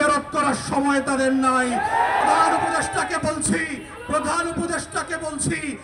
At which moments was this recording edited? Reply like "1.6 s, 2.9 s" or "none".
2.2 s